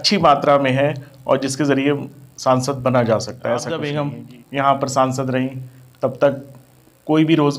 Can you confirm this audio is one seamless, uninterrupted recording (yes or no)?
no